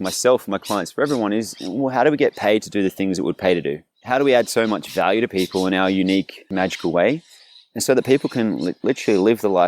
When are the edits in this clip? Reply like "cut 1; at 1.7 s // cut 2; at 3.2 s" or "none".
cut 1; at 3.9 s // cut 2; at 6.5 s